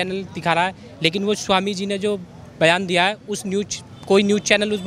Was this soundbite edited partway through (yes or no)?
no